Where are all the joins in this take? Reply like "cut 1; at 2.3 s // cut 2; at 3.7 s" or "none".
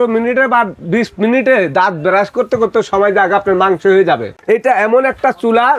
cut 1; at 4.3 s